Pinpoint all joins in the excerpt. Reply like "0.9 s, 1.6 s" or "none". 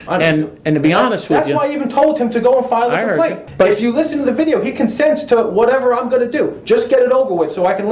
3.4 s